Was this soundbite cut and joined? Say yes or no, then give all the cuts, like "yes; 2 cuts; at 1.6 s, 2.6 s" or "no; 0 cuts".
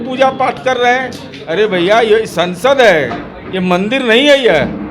no; 0 cuts